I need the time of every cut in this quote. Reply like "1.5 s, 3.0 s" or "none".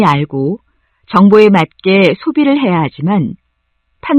none